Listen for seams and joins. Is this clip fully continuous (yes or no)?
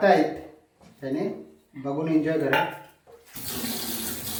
yes